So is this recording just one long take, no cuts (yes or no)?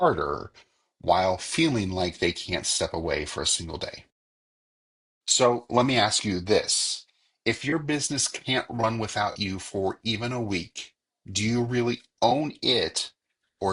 yes